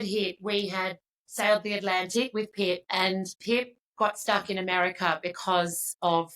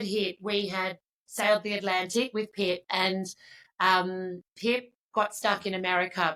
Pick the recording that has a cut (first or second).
first